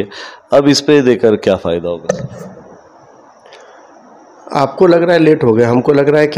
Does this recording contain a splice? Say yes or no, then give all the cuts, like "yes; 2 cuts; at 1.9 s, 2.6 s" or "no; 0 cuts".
no; 0 cuts